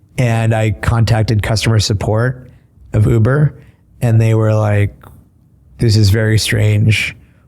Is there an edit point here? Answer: no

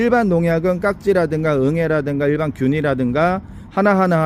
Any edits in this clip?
no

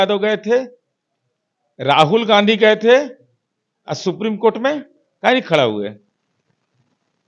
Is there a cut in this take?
no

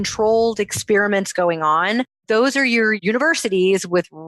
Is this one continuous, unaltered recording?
no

